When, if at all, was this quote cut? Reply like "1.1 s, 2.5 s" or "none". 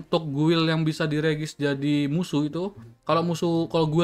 none